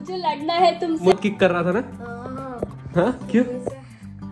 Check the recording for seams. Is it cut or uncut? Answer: cut